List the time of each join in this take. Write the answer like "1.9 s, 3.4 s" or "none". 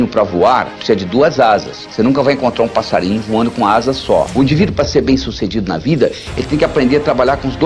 none